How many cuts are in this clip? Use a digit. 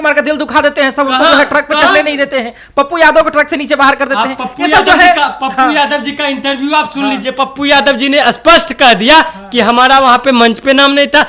0